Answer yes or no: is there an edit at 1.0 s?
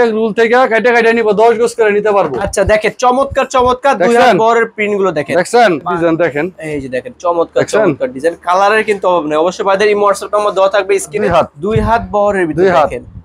no